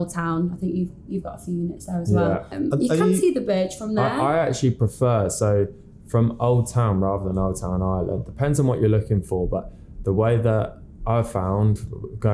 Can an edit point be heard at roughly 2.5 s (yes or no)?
yes